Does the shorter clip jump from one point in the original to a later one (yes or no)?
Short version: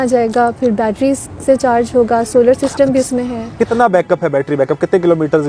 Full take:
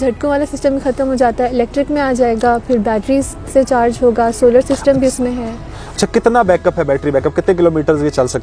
yes